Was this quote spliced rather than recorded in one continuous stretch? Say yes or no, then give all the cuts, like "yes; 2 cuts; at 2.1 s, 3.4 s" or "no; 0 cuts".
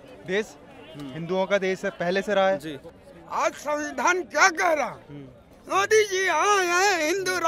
yes; 1 cut; at 2.9 s